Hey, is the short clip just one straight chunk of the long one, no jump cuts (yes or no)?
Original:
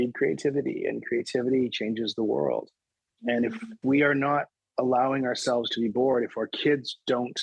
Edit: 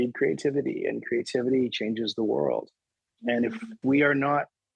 yes